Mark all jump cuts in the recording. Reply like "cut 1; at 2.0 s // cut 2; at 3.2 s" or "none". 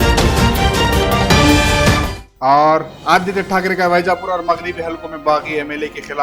none